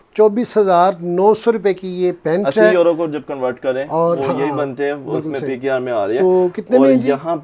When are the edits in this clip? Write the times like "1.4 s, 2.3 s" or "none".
none